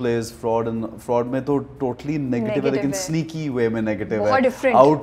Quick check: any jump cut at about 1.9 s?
no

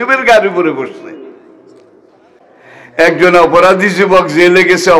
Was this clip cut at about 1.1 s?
no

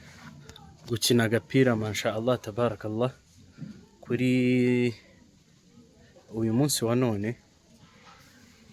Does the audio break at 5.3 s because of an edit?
no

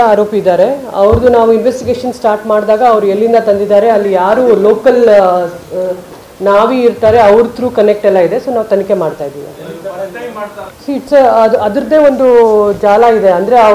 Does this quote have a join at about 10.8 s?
yes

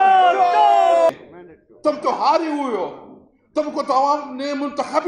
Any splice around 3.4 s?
no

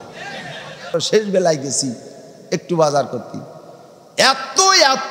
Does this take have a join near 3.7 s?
no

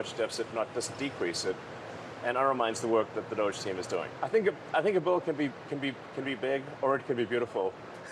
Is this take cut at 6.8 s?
no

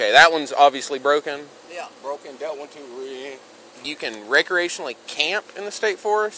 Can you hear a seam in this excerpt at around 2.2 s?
no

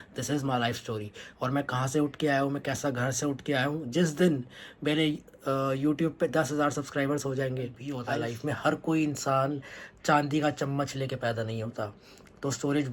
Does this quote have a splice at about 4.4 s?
no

